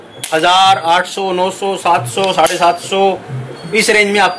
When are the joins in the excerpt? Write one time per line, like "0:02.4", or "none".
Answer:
none

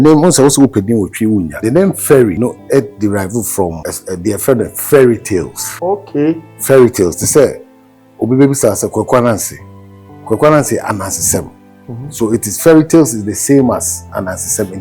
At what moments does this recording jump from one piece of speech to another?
0:01.5
0:02.4
0:03.9
0:05.6

